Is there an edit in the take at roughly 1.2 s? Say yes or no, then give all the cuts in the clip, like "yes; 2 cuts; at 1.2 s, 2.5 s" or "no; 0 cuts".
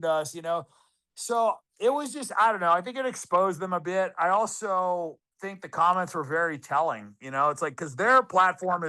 no; 0 cuts